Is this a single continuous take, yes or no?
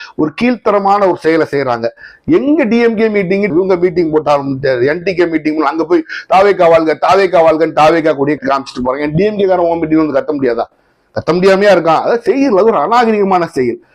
yes